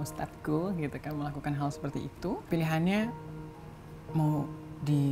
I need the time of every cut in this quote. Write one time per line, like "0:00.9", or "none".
0:02.4